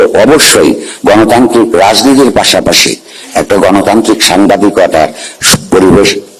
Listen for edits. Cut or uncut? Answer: uncut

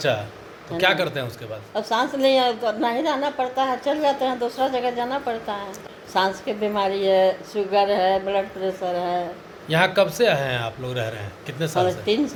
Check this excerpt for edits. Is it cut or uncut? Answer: uncut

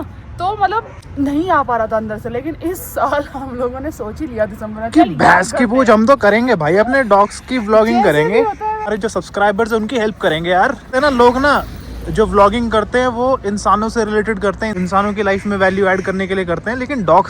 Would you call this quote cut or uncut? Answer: cut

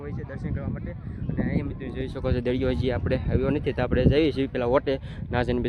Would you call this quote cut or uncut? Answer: uncut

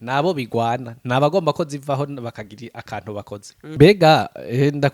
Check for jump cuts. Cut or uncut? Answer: cut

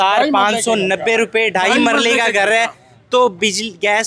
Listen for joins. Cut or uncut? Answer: uncut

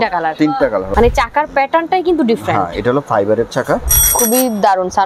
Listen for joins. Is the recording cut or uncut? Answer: cut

